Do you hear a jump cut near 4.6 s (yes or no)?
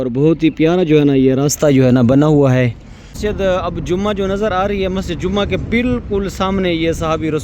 no